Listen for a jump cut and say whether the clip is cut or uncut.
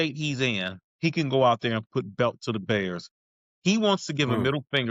uncut